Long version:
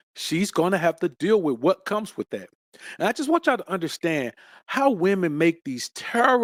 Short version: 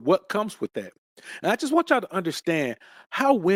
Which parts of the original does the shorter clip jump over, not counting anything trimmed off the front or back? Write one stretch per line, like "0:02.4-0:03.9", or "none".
none